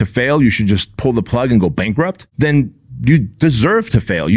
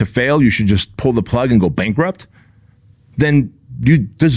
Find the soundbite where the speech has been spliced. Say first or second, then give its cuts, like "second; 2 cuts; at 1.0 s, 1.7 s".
first; 1 cut; at 2.2 s